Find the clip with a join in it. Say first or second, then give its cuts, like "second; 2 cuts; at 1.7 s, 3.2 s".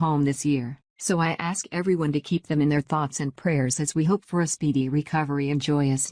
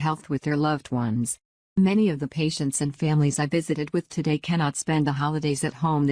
second; 1 cut; at 1.5 s